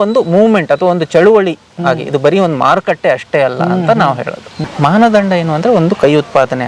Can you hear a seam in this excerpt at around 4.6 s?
yes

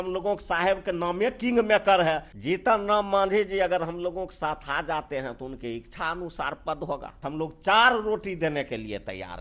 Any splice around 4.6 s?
no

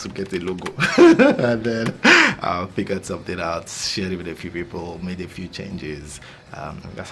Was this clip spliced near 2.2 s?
no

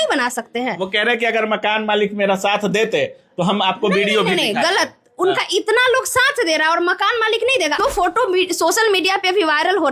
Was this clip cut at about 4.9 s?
no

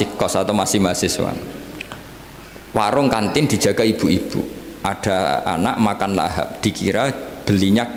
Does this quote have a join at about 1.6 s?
no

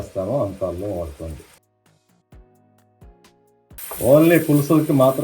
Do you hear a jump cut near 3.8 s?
yes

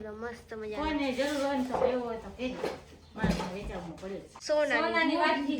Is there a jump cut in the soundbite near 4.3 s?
yes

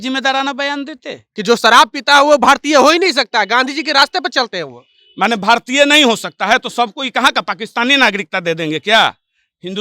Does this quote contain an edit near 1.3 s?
yes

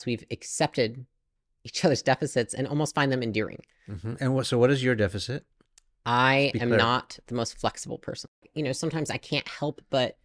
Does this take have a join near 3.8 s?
no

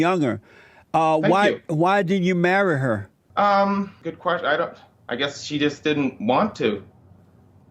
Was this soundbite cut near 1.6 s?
no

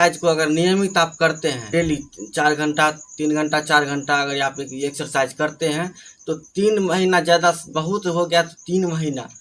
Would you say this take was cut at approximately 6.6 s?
no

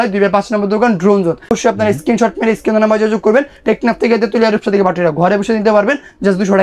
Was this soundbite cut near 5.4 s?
no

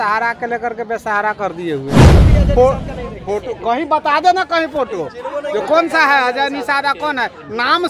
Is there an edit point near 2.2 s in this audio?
yes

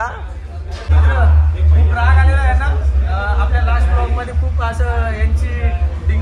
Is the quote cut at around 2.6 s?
no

